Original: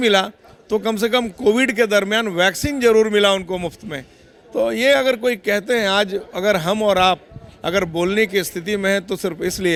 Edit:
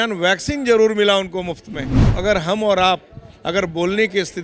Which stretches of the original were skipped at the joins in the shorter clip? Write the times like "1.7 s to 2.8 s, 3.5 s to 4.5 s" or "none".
4.2 s to 6.3 s